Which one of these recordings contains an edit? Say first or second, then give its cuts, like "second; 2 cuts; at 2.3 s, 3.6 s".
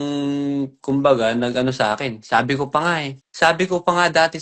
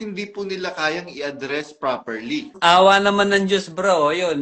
second; 1 cut; at 2.5 s